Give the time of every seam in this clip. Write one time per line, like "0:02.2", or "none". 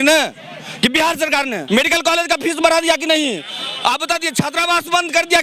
0:01.6

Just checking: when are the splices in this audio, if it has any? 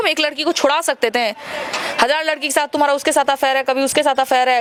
none

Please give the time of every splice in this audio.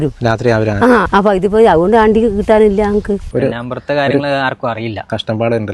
0:01.1
0:03.2

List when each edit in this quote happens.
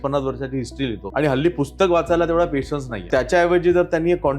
0:01.0
0:03.1

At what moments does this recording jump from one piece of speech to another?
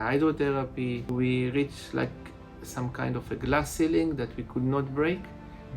0:01.1

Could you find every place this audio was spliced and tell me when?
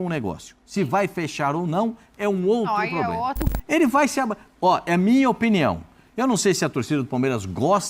0:03.5

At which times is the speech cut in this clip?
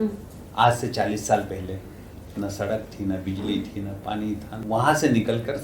0:04.5

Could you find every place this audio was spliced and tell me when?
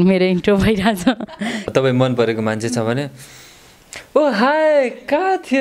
0:01.6

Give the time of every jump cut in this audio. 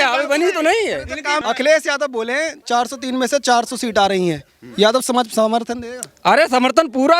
0:01.4

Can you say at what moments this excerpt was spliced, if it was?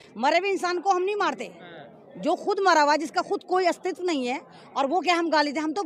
none

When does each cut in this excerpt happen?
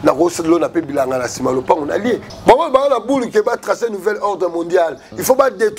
0:02.3

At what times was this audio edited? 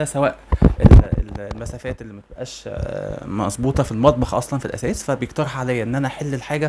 none

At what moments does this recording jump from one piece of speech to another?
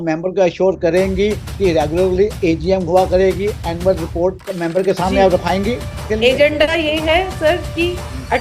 0:06.0

